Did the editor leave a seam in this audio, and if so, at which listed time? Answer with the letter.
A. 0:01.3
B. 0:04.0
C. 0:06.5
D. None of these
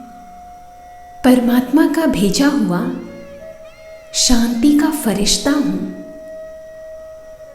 C